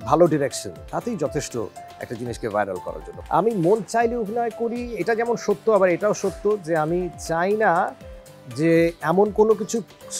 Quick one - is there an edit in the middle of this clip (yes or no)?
yes